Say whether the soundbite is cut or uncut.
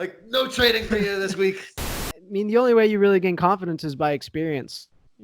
cut